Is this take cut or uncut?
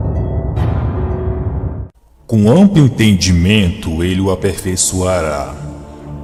uncut